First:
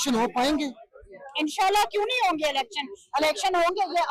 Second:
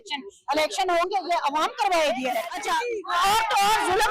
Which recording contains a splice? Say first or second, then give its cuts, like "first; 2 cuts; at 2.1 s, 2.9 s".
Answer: second; 1 cut; at 2.5 s